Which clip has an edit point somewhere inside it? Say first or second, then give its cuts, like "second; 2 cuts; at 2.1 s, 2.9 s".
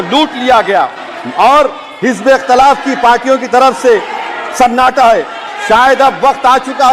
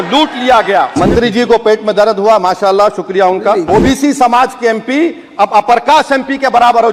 second; 2 cuts; at 0.9 s, 3.6 s